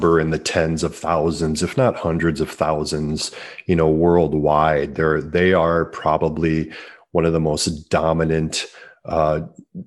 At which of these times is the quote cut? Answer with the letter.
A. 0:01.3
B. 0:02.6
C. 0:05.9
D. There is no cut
D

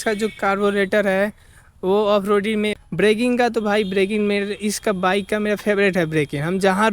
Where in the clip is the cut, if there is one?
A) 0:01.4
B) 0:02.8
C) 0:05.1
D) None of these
B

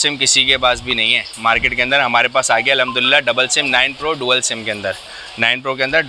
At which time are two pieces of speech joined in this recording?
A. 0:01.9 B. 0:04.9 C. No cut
C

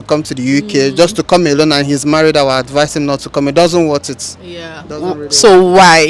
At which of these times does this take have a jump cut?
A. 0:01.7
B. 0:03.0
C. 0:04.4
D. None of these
D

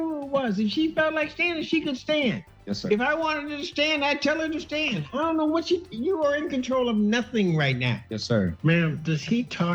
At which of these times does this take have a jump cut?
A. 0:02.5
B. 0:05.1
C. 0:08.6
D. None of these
C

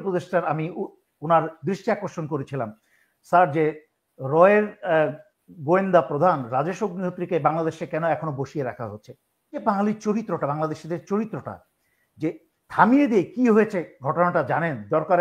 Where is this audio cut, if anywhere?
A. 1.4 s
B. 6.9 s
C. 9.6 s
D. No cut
C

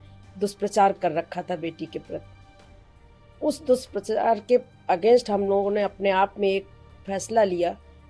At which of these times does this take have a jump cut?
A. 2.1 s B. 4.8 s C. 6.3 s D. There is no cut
D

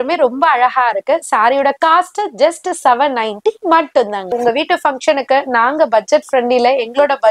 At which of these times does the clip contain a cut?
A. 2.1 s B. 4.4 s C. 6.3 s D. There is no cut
B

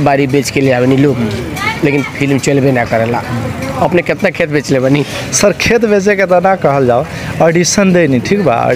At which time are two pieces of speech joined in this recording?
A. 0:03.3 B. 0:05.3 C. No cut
C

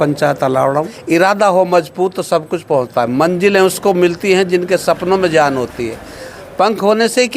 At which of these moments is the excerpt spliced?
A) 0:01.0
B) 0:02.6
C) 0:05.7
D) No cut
A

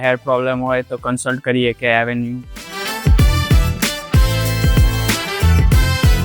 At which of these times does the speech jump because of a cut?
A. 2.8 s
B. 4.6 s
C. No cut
A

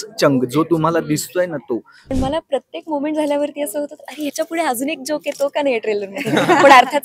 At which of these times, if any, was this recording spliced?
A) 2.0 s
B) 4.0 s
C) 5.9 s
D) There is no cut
A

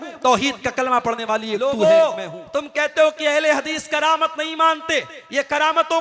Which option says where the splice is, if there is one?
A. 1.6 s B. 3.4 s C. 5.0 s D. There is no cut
A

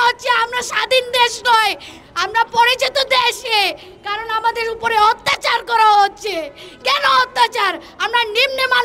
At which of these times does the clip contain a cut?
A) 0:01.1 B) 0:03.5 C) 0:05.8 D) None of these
D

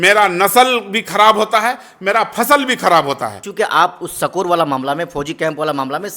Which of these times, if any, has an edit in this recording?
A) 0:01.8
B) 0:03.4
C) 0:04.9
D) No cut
B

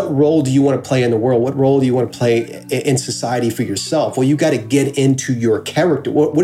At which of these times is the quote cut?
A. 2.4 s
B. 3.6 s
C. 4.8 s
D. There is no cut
D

